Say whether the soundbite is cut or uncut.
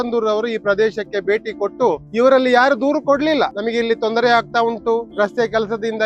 cut